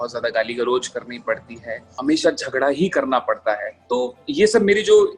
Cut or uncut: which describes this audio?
cut